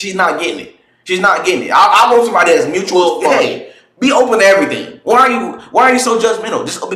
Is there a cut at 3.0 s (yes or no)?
yes